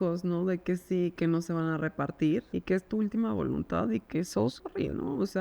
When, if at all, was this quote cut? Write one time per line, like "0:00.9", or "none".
0:01.2
0:02.5